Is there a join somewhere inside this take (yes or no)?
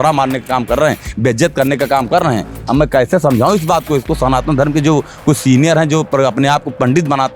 no